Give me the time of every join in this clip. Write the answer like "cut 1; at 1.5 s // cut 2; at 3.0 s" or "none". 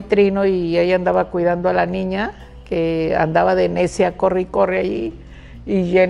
none